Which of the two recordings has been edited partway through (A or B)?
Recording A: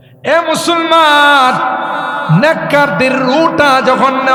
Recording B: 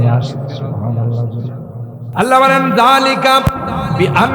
B